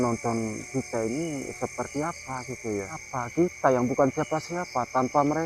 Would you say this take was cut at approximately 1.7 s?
no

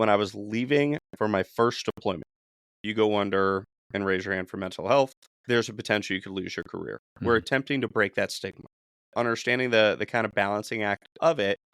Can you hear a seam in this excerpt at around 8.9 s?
yes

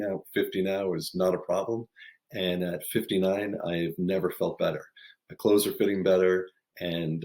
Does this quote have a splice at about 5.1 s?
no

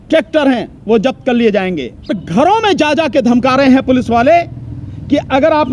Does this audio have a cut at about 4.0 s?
no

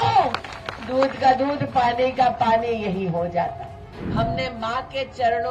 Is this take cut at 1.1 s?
no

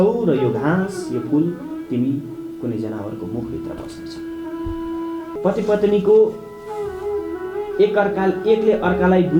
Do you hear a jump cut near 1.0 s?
no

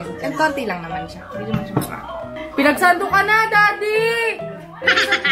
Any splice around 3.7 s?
no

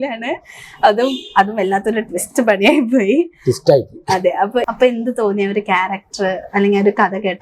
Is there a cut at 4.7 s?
yes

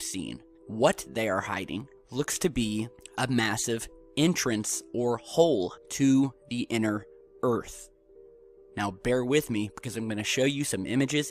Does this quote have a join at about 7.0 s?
no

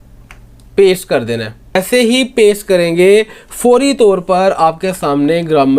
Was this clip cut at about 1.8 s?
yes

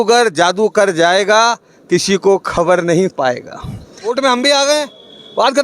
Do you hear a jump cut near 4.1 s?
yes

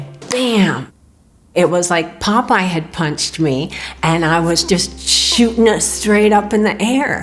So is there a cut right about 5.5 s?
no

